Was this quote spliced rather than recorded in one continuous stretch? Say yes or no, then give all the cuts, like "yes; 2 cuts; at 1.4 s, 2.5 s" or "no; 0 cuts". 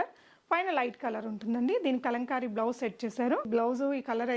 yes; 1 cut; at 3.5 s